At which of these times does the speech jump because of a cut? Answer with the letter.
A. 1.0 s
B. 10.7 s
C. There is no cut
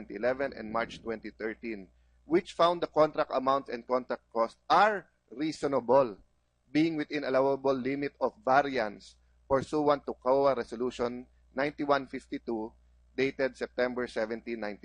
B